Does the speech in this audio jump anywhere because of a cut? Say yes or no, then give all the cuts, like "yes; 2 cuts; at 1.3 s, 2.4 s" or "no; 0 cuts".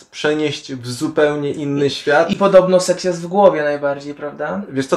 no; 0 cuts